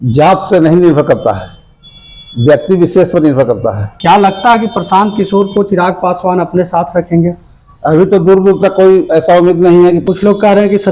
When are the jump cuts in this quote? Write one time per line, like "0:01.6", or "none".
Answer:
0:03.9
0:10.0